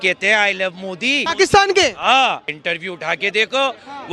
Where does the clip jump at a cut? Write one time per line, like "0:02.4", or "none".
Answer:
0:01.2
0:02.5